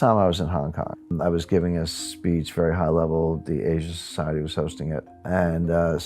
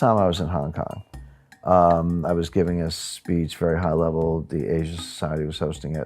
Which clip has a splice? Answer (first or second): first